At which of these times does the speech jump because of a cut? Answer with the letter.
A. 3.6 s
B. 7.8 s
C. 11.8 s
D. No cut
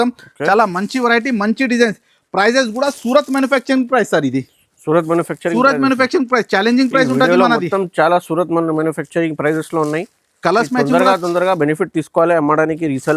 D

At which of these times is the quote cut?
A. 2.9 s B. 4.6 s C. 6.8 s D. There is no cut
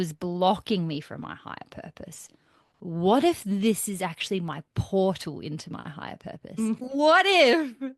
C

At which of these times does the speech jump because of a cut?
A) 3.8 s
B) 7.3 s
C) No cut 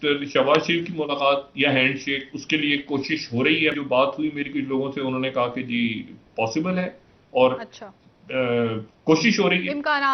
A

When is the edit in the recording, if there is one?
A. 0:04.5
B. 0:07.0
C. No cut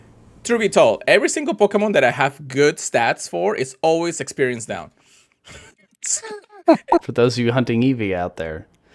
B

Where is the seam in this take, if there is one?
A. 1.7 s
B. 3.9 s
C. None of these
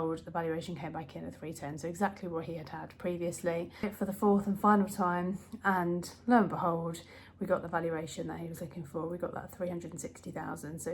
B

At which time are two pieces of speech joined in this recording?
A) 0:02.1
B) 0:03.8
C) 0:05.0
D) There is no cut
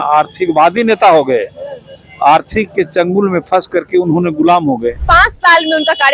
C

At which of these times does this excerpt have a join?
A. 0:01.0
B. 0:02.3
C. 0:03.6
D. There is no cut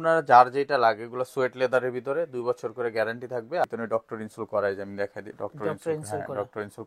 C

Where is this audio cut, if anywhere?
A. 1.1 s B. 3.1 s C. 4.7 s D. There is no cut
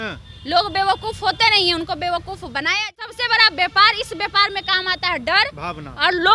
B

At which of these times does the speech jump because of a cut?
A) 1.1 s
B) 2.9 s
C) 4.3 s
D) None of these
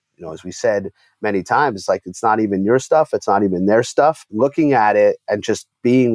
C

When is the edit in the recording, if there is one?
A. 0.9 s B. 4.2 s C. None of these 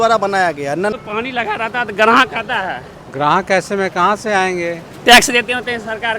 A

